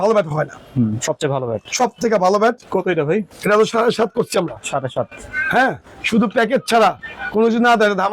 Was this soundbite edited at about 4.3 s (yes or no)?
no